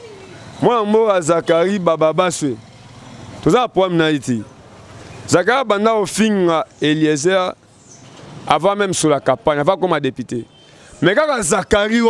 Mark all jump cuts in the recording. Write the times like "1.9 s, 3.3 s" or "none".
none